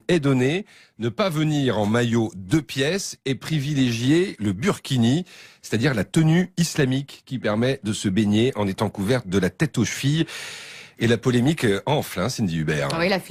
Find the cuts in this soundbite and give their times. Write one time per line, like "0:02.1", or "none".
0:05.1